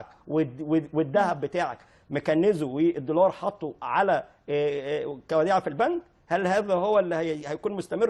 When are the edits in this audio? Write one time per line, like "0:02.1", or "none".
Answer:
none